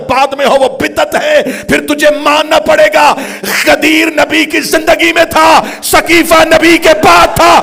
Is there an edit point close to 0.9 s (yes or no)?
no